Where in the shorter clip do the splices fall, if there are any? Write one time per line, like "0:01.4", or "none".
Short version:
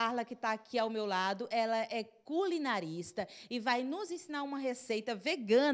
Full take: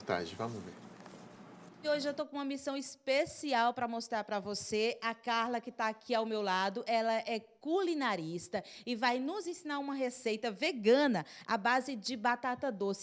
none